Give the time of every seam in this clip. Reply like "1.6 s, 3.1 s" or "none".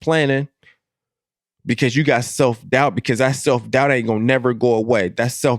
none